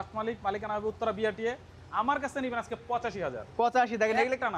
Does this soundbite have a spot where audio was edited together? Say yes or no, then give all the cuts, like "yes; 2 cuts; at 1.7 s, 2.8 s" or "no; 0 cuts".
no; 0 cuts